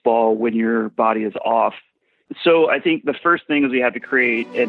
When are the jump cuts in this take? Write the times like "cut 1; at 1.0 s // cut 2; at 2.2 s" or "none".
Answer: none